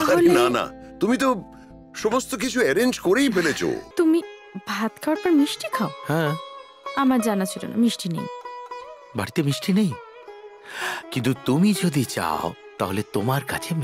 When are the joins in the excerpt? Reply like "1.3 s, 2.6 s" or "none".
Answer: 3.8 s